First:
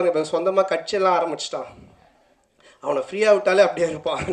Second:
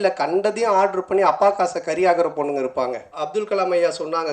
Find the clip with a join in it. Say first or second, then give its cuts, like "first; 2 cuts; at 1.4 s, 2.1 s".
second; 1 cut; at 3.1 s